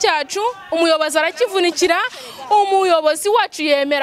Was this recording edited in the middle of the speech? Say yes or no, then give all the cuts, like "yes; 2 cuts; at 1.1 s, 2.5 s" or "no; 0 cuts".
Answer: no; 0 cuts